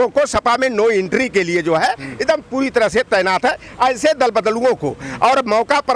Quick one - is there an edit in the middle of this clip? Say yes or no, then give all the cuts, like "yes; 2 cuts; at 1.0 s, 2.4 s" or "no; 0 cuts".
no; 0 cuts